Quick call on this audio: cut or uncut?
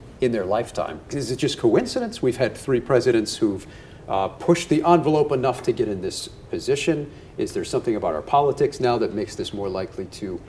cut